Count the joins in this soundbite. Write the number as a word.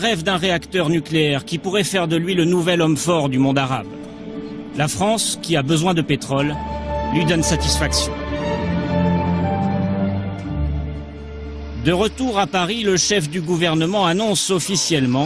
one